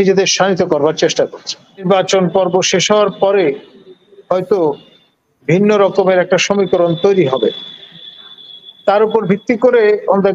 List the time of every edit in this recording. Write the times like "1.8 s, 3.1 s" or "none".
1.8 s